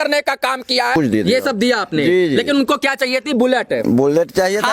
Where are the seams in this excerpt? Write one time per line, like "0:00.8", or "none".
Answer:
0:00.9